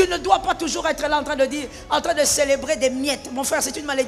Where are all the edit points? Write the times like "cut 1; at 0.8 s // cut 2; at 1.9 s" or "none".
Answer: none